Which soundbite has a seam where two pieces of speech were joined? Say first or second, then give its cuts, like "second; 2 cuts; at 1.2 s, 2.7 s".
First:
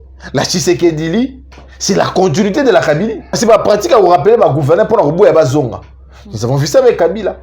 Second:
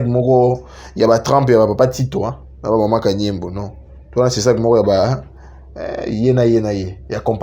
first; 1 cut; at 3.4 s